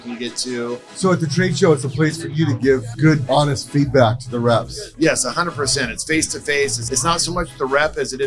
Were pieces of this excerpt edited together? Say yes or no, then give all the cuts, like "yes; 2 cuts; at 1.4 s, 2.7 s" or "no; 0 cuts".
yes; 4 cuts; at 0.9 s, 3.1 s, 4.8 s, 6.8 s